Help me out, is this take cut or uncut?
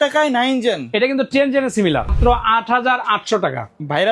cut